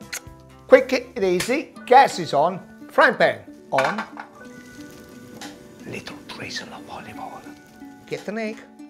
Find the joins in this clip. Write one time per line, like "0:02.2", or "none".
0:01.0